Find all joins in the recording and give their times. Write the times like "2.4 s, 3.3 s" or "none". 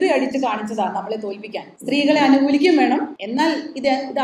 1.7 s, 3.2 s